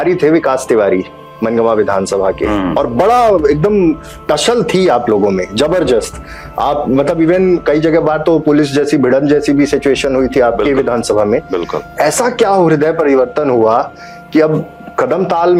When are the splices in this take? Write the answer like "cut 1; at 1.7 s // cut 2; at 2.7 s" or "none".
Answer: none